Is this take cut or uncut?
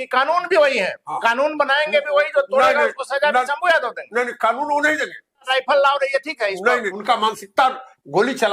cut